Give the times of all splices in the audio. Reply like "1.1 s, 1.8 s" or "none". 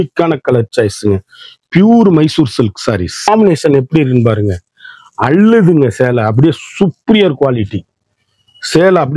3.3 s